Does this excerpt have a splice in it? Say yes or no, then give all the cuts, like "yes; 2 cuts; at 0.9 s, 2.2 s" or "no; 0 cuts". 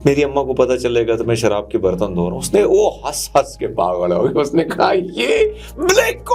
no; 0 cuts